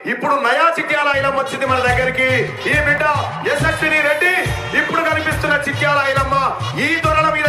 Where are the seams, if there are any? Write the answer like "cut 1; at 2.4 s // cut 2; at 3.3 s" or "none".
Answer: none